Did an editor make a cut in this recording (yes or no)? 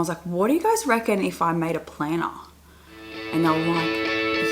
no